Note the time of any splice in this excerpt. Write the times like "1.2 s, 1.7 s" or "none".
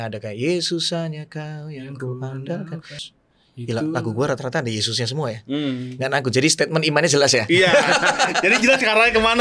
3.0 s